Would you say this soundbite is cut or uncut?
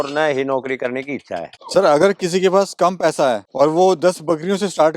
cut